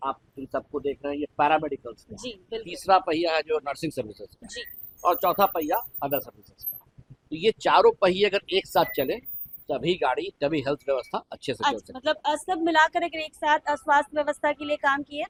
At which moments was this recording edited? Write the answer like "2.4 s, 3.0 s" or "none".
none